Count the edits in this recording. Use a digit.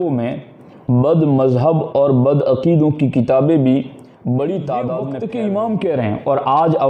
1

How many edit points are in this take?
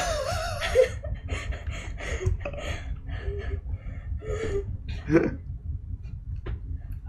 0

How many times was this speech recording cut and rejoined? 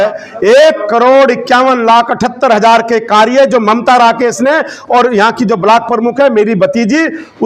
0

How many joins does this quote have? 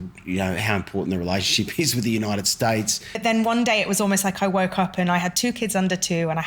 1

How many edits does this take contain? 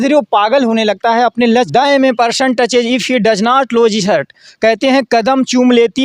1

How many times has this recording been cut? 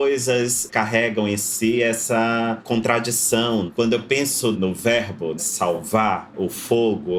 0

